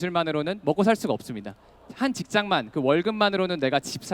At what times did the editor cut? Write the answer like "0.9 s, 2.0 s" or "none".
1.8 s